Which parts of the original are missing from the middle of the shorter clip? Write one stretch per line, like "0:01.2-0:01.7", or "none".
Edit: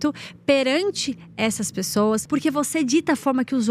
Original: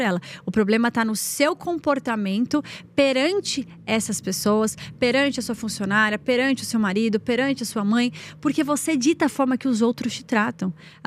0:04.7-0:08.4